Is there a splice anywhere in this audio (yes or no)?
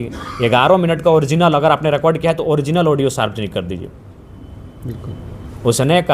no